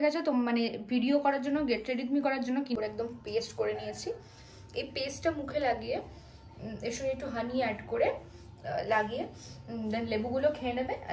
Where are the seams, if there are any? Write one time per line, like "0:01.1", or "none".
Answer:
0:02.8